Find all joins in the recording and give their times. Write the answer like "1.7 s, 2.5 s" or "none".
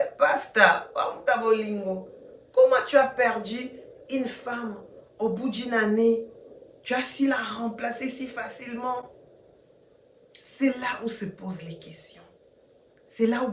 none